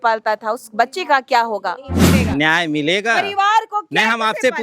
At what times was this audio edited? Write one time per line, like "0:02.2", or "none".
0:02.2